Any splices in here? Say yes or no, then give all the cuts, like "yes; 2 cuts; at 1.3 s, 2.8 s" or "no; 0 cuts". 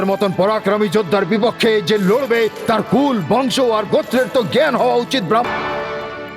yes; 1 cut; at 5.5 s